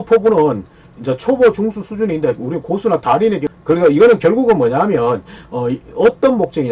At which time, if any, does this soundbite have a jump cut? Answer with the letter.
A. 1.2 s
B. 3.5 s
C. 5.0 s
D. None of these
B